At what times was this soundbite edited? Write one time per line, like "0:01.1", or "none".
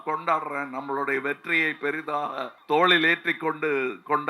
0:02.5

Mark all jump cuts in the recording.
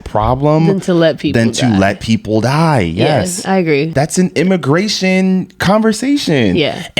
0:03.9

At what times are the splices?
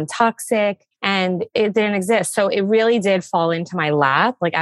none

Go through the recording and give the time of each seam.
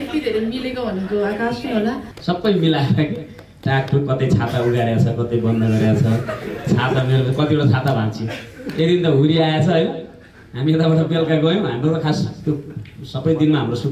0:02.1

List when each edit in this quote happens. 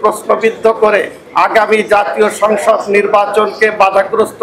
none

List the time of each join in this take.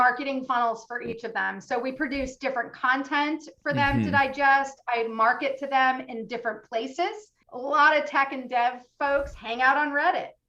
0:07.3

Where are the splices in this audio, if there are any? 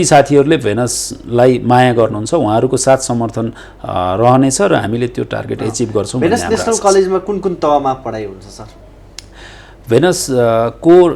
none

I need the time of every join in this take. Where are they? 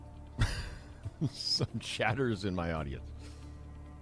0:01.2
0:03.0

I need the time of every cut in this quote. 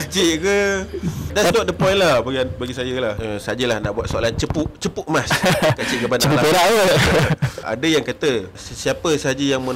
0:01.3
0:03.2
0:07.7
0:08.7

